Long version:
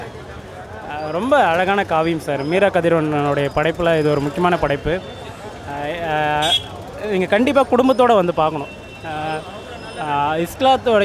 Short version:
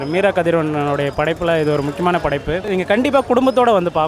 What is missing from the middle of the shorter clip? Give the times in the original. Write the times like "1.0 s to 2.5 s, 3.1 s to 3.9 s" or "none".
5.0 s to 7.1 s